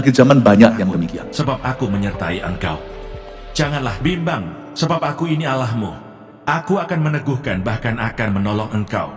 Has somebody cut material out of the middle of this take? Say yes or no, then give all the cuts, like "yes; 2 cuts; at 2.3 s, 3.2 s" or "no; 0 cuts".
yes; 1 cut; at 1.2 s